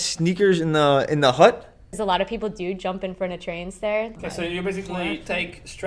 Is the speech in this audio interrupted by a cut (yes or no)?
yes